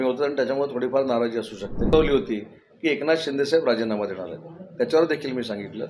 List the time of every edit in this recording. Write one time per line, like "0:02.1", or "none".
0:01.9